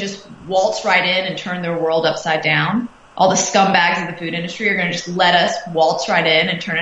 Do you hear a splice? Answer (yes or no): no